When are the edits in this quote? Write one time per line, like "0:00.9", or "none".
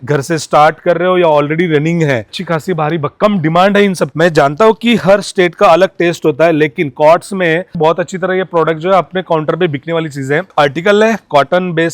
0:02.4
0:04.1
0:07.8
0:10.5

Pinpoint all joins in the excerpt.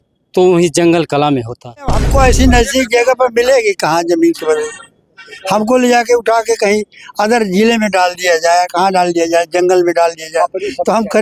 0:02.0

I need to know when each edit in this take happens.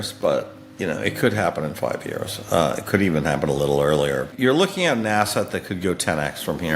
0:04.3

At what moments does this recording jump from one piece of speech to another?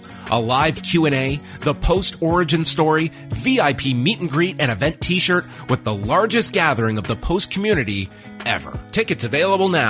0:08.7

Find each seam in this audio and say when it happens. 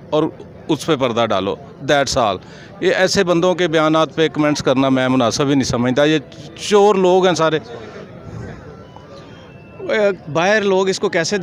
none

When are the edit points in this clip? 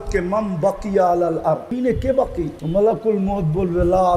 0:01.7
0:02.6

